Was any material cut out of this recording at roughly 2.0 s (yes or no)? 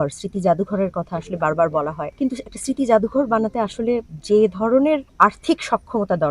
yes